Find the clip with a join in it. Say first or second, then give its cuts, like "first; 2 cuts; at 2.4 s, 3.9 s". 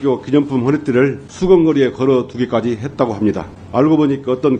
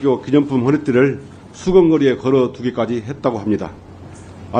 first; 2 cuts; at 1.3 s, 3.5 s